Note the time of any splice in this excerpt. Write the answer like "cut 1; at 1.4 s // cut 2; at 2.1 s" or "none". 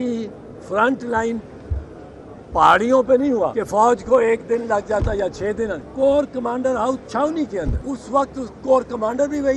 cut 1; at 3.4 s // cut 2; at 5.8 s // cut 3; at 7.8 s